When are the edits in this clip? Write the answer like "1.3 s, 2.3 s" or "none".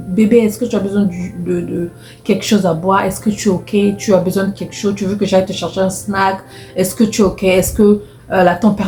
none